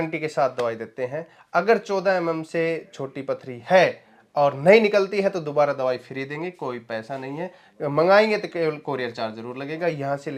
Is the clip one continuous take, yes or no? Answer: yes